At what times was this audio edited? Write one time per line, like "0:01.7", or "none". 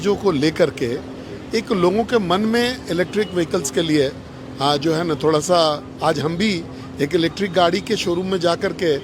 none